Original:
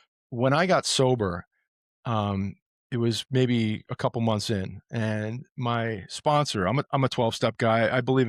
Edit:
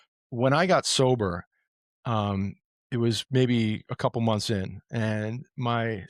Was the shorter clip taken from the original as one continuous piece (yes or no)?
yes